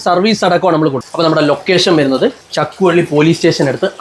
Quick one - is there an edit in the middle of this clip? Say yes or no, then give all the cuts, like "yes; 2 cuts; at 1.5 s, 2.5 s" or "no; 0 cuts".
yes; 2 cuts; at 1.0 s, 2.5 s